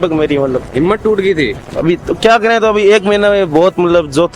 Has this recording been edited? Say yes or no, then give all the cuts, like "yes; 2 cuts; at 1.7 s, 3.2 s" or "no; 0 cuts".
no; 0 cuts